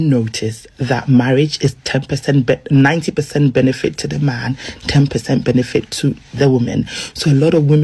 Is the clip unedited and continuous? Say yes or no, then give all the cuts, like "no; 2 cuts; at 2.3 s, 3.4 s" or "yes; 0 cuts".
yes; 0 cuts